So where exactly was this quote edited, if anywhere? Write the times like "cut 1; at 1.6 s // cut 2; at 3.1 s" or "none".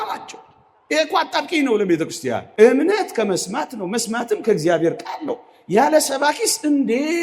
cut 1; at 2.5 s